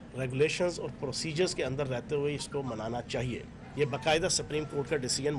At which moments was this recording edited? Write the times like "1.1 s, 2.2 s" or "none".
none